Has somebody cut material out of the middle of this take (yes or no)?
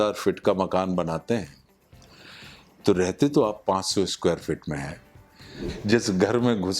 yes